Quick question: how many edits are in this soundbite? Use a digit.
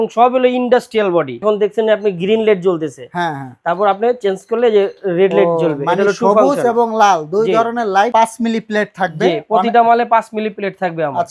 2